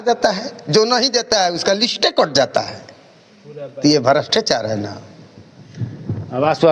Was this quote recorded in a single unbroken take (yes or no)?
yes